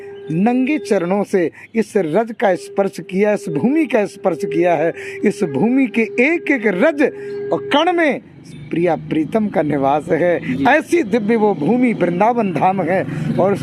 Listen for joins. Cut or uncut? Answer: uncut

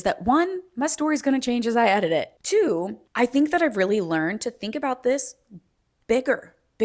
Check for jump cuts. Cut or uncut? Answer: cut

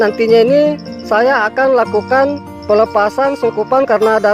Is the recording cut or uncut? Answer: cut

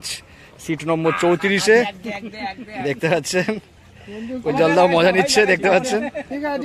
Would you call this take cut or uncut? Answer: uncut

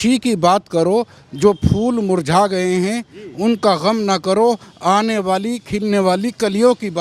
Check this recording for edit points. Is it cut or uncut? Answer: uncut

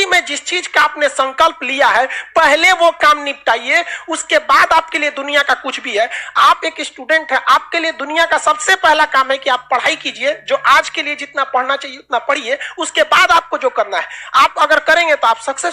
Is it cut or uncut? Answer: uncut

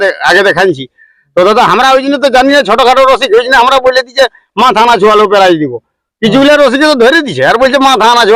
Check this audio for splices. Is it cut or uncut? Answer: uncut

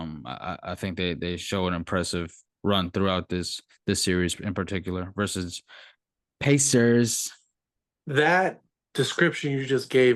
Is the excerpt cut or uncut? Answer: cut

